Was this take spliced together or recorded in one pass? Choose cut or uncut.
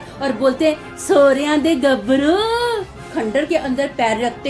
cut